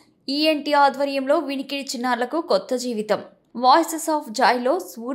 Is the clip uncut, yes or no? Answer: yes